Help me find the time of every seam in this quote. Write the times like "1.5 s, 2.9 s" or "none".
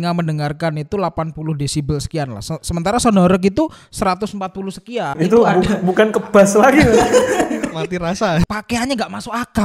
5.1 s, 8.4 s